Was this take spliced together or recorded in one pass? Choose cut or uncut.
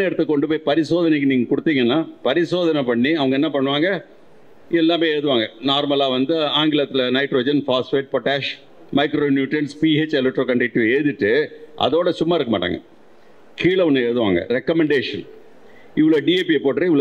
uncut